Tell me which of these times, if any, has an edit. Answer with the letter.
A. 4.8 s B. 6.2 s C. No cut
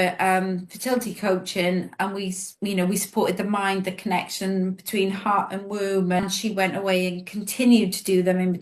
B